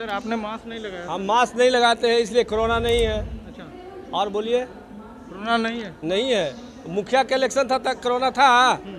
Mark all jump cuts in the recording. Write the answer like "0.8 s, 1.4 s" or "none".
none